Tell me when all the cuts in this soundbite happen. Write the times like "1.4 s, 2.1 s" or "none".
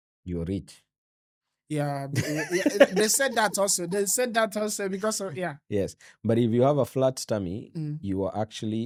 none